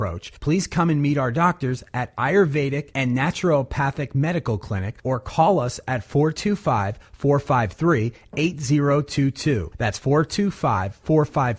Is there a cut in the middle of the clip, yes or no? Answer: no